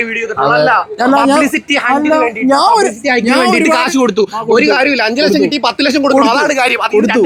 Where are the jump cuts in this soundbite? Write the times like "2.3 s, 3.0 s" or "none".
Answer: none